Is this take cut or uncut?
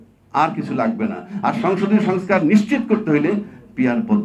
uncut